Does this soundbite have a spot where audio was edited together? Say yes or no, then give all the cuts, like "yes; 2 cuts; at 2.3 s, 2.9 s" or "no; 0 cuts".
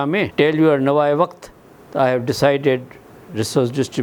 no; 0 cuts